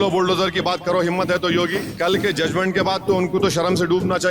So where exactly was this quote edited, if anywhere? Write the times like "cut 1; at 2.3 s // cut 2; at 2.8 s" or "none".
cut 1; at 1.8 s